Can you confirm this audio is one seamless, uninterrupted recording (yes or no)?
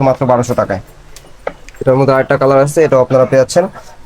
yes